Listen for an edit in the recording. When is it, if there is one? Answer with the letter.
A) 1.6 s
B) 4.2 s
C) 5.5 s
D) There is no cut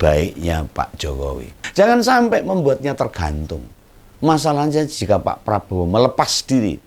A